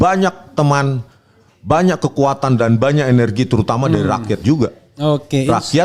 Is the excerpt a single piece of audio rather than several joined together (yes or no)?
yes